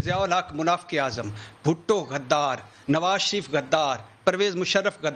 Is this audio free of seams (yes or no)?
no